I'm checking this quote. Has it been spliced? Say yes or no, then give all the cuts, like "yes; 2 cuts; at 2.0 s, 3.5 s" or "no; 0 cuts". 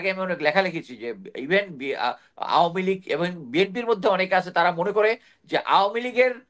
no; 0 cuts